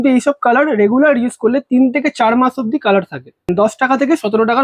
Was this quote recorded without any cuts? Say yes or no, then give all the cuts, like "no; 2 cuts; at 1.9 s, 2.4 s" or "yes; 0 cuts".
no; 1 cut; at 3.5 s